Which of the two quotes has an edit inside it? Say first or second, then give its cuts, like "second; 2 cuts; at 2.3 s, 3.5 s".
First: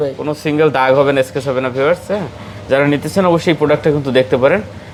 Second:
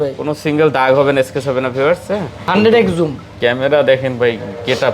second; 1 cut; at 2.4 s